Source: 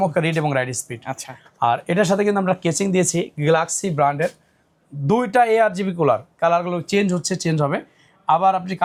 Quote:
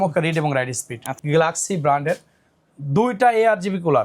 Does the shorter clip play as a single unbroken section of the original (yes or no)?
no